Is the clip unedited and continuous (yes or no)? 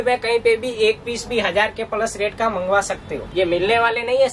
no